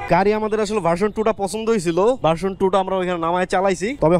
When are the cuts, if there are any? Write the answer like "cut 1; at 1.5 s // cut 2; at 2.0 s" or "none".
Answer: cut 1; at 2.2 s